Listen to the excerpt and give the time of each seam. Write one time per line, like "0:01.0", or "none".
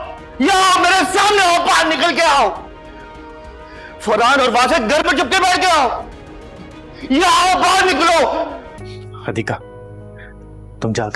0:08.8